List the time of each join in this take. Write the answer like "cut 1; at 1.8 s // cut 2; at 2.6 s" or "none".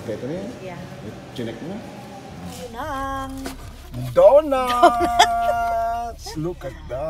cut 1; at 2.7 s

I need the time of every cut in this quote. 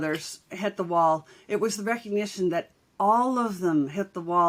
none

